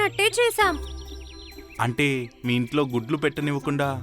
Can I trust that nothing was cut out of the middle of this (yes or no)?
yes